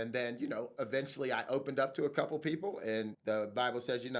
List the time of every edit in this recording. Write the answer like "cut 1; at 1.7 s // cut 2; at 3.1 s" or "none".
cut 1; at 3.2 s